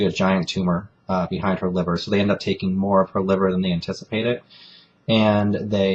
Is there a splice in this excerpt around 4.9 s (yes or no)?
no